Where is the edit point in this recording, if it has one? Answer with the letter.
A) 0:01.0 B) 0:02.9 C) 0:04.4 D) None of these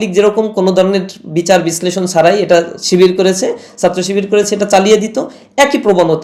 D